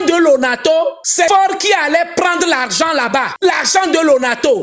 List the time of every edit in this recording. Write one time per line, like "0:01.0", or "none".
0:01.2
0:03.3